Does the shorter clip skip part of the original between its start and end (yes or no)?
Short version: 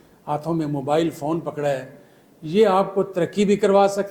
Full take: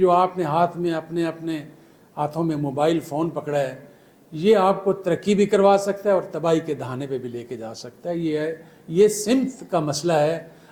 no